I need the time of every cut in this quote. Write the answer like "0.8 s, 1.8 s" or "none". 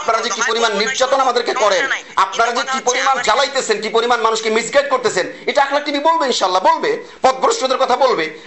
none

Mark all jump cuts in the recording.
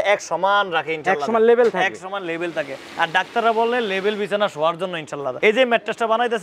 none

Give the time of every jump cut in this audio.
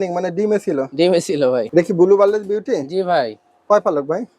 1.6 s

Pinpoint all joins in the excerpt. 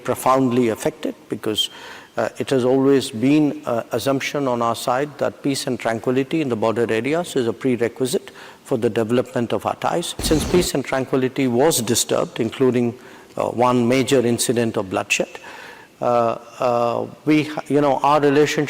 10.2 s

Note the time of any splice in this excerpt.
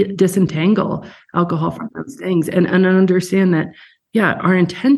none

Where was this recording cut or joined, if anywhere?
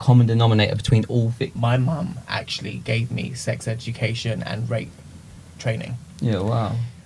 1.5 s

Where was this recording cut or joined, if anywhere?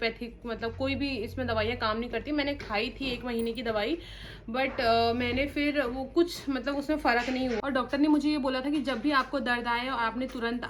none

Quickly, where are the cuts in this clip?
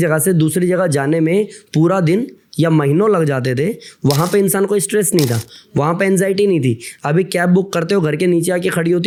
none

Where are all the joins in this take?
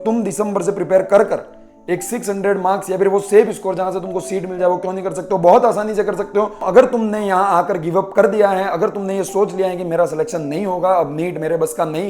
6.6 s

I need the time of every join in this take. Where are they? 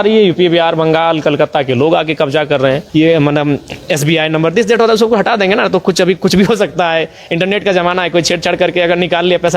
2.8 s

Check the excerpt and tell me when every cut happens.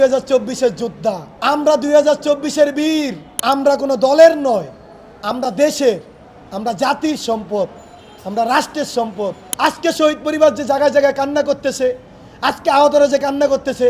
1.3 s, 3.3 s, 9.5 s

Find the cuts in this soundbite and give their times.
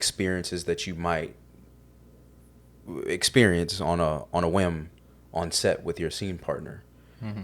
none

